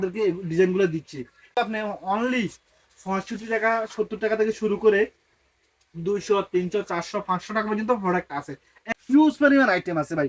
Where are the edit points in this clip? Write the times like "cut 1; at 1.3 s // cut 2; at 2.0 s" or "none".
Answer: cut 1; at 1.4 s // cut 2; at 8.8 s